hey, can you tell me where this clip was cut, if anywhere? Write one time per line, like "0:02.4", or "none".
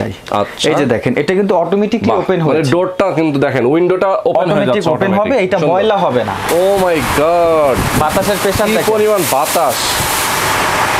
0:06.4